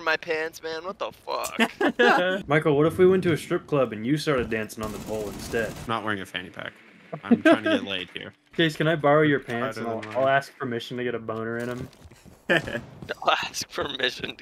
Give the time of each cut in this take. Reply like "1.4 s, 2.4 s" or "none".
2.4 s, 5.8 s, 8.5 s